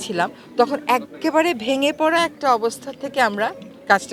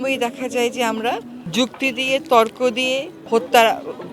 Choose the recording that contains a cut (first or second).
second